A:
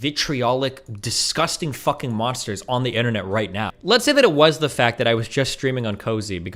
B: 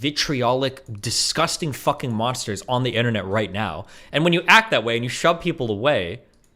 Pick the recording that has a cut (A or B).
A